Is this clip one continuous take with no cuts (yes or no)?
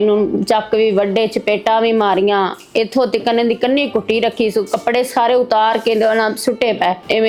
yes